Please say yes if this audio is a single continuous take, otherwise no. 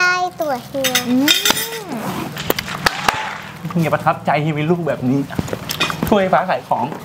yes